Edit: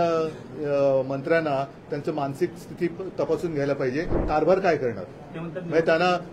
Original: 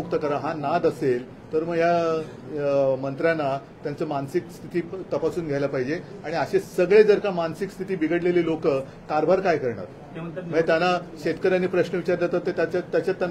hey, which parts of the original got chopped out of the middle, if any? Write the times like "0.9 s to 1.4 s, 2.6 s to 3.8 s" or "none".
6.1 s to 9.0 s